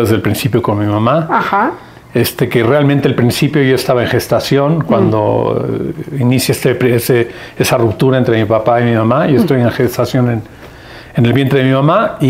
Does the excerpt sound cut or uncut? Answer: uncut